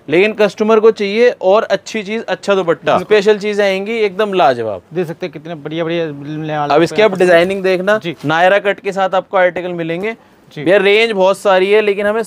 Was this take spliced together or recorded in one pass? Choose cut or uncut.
cut